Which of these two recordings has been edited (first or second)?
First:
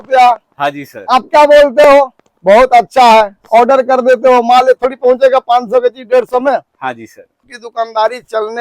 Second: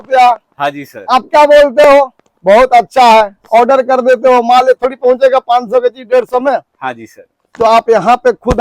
first